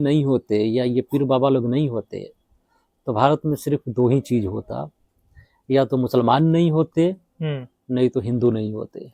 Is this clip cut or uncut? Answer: uncut